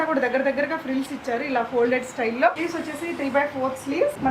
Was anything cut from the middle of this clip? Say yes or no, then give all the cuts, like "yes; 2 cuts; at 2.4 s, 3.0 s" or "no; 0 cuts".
yes; 1 cut; at 2.6 s